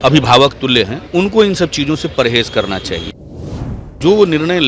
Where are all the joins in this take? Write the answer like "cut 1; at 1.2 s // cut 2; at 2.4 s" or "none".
cut 1; at 1.0 s // cut 2; at 3.6 s